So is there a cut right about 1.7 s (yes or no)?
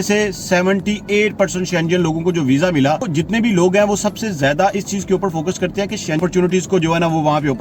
no